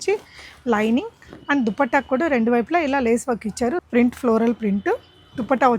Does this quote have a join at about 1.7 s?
no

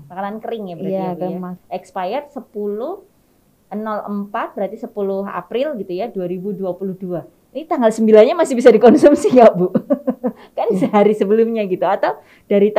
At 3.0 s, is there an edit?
no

